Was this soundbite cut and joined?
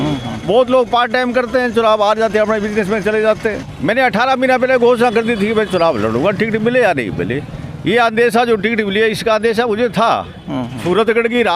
yes; 2 cuts; at 3.6 s, 10.8 s

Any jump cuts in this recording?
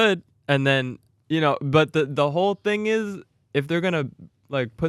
no; 0 cuts

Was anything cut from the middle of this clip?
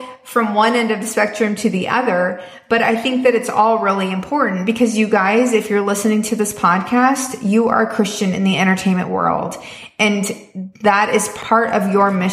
yes; 1 cut; at 11.3 s

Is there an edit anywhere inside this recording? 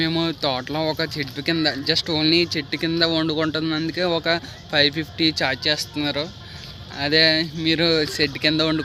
no; 0 cuts

